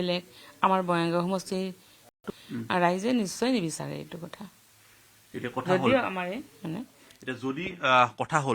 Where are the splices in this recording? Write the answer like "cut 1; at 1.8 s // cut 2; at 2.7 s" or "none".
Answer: none